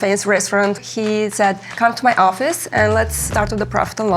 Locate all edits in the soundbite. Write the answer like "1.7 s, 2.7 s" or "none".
0.8 s, 1.7 s, 3.3 s